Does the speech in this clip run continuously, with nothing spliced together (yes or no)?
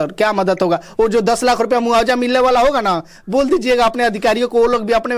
yes